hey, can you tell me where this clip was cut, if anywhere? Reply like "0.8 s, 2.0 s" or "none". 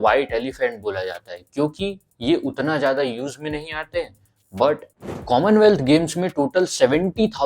4.9 s